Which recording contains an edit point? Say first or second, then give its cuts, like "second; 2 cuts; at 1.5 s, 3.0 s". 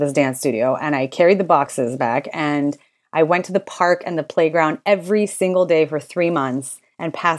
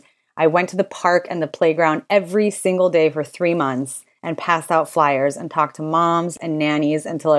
first; 1 cut; at 1.7 s